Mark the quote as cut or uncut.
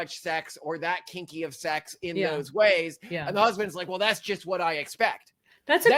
uncut